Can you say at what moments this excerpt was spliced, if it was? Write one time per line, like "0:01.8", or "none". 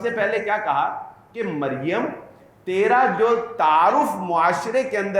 none